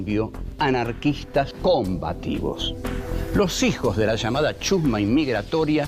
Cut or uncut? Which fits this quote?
uncut